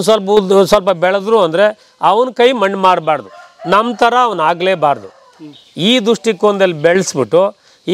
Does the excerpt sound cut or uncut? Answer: uncut